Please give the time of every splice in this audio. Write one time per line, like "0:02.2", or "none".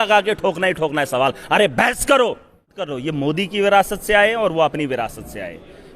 0:03.0